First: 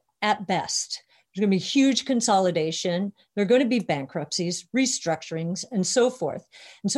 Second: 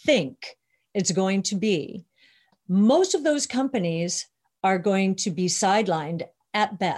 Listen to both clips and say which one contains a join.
second; 1 cut; at 2.5 s

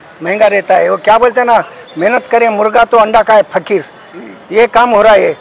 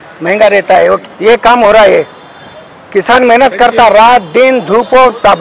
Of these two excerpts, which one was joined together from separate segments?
second; 1 cut; at 1.0 s

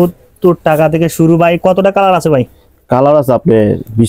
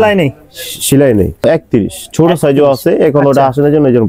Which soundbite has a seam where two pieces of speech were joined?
second; 1 cut; at 1.4 s

